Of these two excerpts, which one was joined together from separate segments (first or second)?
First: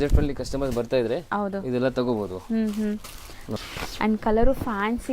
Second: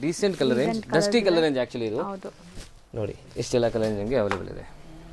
first